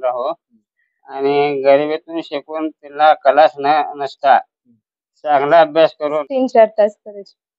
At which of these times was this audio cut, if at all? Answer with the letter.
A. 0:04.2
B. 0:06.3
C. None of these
B